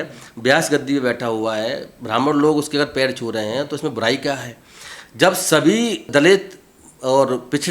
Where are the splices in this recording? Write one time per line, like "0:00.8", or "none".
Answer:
0:06.1